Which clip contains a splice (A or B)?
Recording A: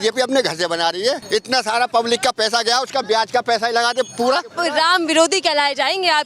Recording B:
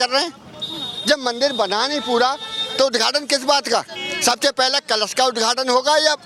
A